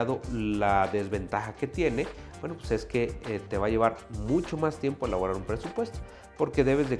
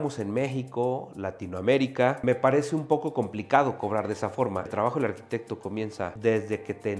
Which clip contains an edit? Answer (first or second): second